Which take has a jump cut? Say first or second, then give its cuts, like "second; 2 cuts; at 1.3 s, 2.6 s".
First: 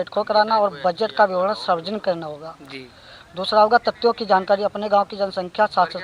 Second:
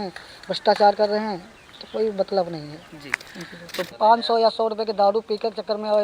second; 1 cut; at 4.0 s